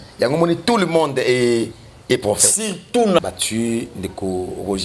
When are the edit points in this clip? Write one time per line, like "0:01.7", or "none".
0:03.2